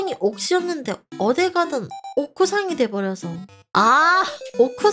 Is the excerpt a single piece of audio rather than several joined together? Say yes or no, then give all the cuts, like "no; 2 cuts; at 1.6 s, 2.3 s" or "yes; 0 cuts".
yes; 0 cuts